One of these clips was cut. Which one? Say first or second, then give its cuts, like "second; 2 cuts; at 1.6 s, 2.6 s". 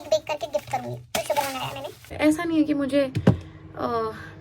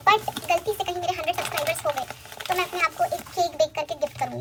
first; 1 cut; at 2.1 s